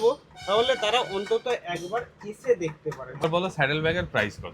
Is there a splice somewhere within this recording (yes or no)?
yes